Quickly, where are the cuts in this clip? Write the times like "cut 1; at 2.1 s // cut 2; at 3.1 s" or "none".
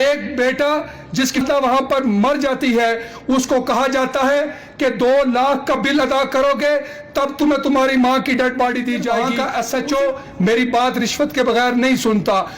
cut 1; at 1.4 s // cut 2; at 9.2 s